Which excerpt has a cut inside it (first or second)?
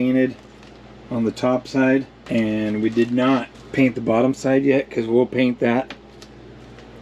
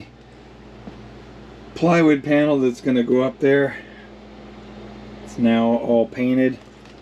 first